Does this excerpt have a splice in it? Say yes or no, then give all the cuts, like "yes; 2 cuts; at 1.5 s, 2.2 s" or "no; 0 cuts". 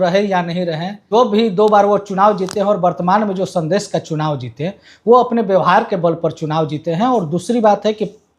yes; 1 cut; at 0.9 s